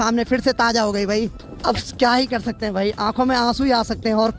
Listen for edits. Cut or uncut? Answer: uncut